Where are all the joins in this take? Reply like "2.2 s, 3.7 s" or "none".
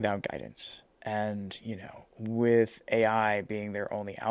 none